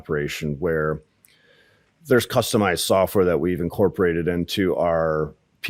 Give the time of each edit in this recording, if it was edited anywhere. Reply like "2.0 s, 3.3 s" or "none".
none